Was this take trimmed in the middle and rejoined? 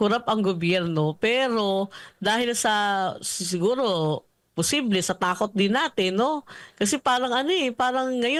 no; 0 cuts

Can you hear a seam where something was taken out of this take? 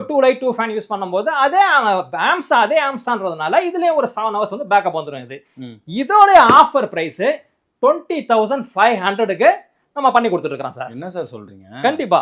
no; 0 cuts

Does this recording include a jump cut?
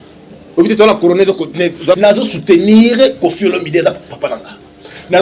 yes; 1 cut; at 2.0 s

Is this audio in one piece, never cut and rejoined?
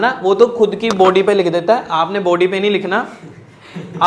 yes; 0 cuts

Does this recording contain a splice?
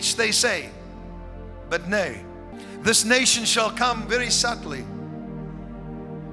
yes; 1 cut; at 2.5 s

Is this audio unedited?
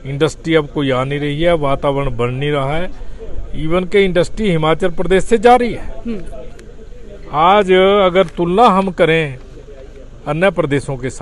yes; 0 cuts

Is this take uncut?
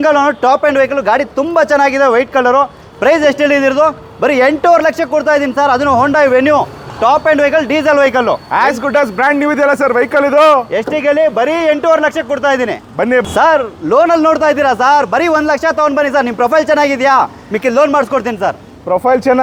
yes; 0 cuts

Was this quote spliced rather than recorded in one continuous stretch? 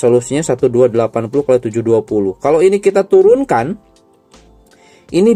no; 0 cuts

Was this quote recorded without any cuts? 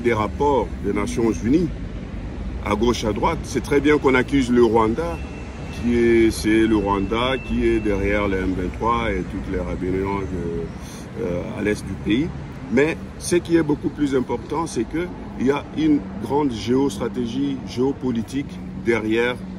yes; 0 cuts

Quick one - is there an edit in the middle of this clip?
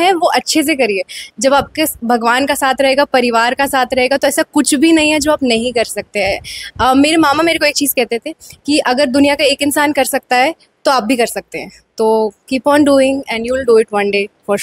no; 0 cuts

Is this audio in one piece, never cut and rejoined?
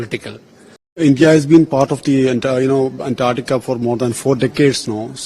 no; 1 cut; at 0.9 s

